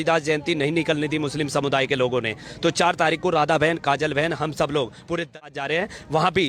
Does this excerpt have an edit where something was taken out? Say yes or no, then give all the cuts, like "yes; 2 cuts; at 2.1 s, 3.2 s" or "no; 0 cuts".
yes; 1 cut; at 5.4 s